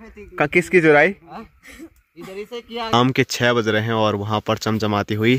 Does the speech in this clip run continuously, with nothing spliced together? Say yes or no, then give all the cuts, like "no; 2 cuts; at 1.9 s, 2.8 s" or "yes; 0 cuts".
no; 1 cut; at 2.9 s